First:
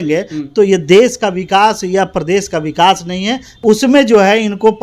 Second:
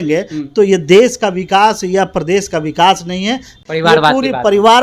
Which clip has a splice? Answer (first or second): first